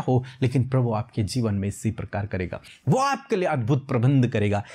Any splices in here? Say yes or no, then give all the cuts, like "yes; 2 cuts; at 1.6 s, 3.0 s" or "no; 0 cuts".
yes; 1 cut; at 2.7 s